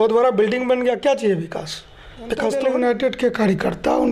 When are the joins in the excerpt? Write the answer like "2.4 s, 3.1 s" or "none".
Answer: 2.5 s